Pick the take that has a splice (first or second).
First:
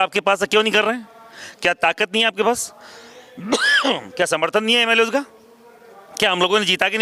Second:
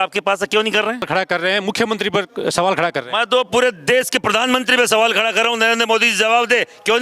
second